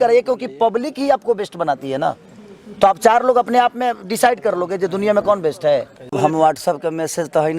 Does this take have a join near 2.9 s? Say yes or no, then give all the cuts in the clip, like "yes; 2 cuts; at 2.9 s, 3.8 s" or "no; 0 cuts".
no; 1 cut; at 6.2 s